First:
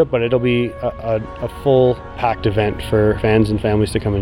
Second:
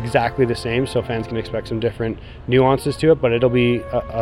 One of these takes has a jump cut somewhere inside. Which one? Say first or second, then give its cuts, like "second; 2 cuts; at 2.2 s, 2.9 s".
first; 2 cuts; at 2.2 s, 3.2 s